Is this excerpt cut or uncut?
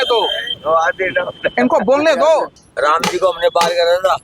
cut